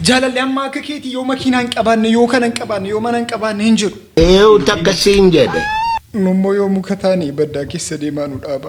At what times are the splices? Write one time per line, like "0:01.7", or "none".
none